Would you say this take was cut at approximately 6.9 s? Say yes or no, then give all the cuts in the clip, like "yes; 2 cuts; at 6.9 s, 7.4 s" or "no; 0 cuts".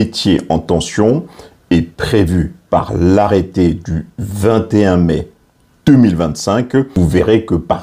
yes; 1 cut; at 6.9 s